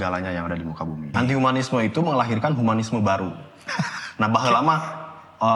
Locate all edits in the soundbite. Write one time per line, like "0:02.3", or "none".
0:01.1